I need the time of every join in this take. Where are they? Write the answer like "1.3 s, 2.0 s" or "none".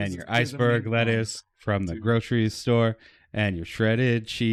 none